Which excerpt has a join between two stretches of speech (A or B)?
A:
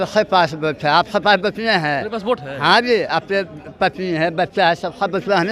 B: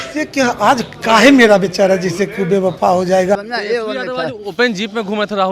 B